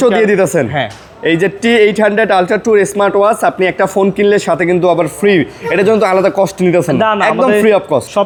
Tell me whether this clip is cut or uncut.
uncut